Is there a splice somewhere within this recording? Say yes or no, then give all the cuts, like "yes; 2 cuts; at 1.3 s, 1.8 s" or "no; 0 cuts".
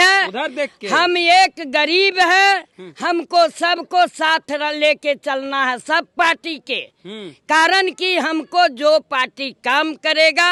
no; 0 cuts